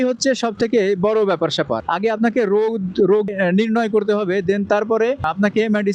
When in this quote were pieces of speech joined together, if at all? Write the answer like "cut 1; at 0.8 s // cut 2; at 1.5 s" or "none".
cut 1; at 3.3 s